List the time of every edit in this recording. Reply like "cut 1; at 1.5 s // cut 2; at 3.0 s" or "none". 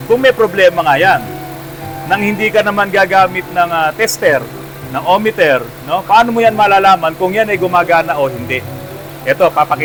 none